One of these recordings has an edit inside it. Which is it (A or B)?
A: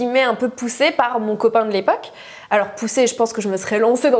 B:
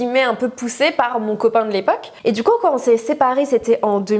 B